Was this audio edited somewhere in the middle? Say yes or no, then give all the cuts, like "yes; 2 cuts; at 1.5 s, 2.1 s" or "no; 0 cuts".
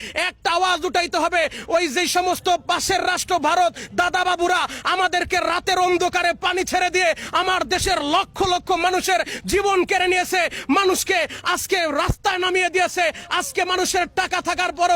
no; 0 cuts